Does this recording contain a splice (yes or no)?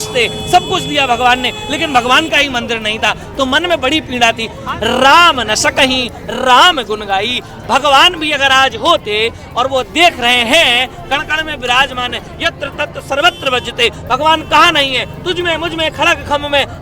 yes